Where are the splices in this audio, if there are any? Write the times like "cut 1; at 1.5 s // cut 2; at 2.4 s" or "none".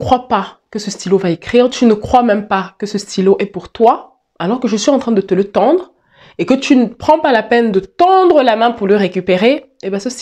none